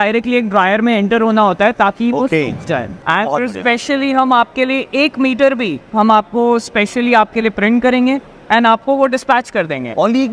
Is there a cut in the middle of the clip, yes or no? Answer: yes